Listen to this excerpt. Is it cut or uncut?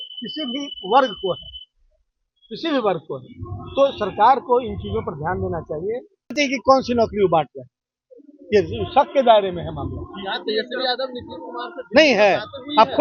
cut